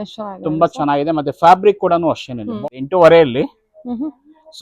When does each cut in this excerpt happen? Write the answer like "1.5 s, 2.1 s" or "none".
2.4 s